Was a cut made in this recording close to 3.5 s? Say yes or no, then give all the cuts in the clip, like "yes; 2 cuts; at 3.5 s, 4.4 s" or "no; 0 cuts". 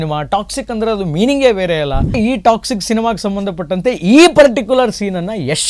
no; 1 cut; at 2.2 s